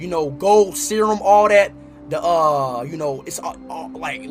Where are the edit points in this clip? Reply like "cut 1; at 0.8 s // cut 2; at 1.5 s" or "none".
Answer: none